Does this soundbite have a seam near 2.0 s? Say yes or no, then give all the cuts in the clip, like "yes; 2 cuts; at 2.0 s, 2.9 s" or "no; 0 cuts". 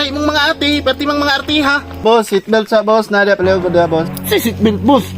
yes; 1 cut; at 2.0 s